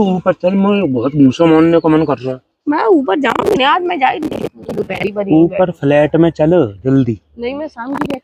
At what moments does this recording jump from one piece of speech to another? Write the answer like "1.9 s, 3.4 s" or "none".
none